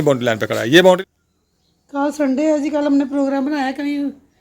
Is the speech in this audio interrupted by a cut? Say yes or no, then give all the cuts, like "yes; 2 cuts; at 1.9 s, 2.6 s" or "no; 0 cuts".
yes; 1 cut; at 1.0 s